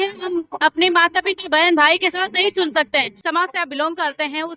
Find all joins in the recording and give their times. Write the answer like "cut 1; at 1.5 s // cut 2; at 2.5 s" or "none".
cut 1; at 3.2 s